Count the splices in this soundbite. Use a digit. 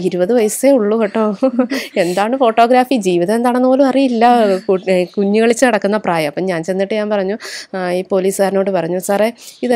0